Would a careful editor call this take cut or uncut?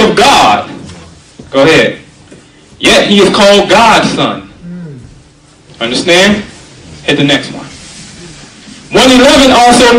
uncut